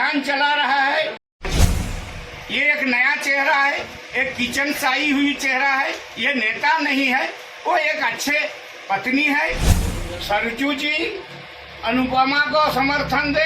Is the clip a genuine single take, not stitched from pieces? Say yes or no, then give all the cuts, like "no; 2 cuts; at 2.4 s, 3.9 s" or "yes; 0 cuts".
no; 2 cuts; at 1.8 s, 9.7 s